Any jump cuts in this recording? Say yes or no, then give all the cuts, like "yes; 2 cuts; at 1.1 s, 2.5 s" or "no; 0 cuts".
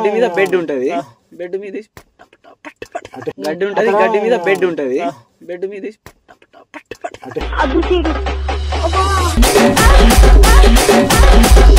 no; 0 cuts